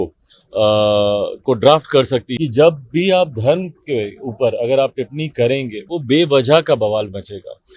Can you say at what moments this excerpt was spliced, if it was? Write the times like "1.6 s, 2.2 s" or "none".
2.3 s

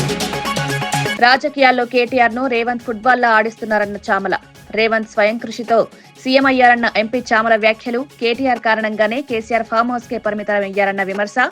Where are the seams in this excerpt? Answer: 1.1 s

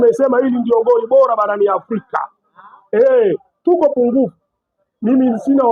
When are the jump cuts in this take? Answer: none

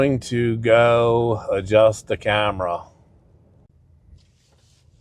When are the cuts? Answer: 3.7 s

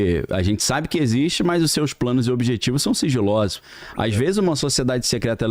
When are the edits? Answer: 3.6 s

